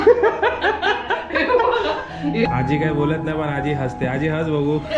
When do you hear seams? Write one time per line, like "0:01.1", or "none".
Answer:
0:02.5